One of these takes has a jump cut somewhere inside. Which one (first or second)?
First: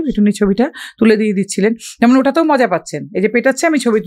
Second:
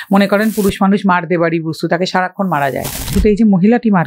second